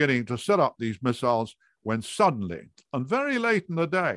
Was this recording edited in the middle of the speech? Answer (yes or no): no